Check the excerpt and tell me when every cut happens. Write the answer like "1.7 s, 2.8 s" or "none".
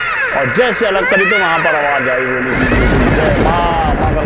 none